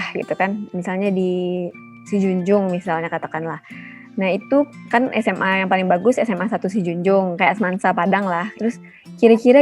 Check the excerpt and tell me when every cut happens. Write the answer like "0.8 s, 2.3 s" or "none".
8.5 s